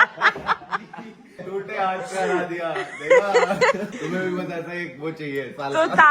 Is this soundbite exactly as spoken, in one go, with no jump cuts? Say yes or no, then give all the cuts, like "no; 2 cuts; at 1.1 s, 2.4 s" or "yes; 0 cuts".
no; 2 cuts; at 1.3 s, 3.9 s